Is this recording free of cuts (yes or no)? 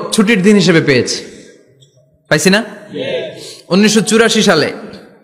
yes